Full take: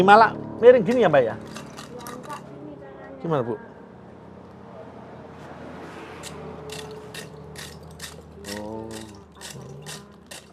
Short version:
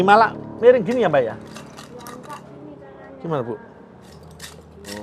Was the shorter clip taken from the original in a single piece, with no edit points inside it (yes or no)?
no